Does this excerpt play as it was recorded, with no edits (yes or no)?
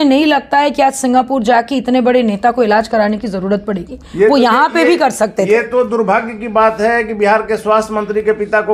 yes